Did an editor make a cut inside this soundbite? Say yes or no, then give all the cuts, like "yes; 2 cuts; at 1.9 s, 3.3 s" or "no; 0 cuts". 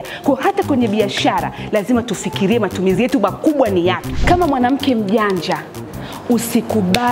yes; 1 cut; at 4.1 s